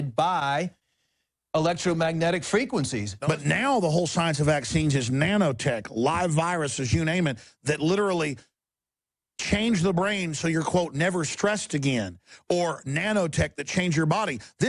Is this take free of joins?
no; 1 cut; at 3.0 s

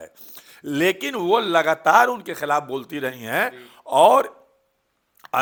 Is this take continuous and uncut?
yes; 0 cuts

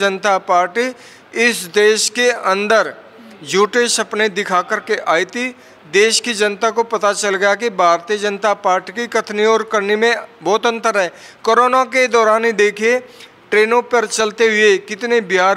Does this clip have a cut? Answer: no; 0 cuts

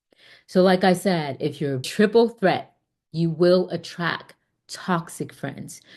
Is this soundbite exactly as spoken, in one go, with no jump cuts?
no; 1 cut; at 1.9 s

